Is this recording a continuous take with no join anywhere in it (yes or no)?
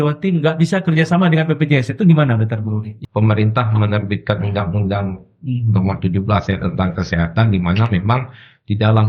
no